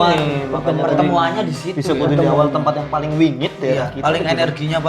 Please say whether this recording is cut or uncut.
uncut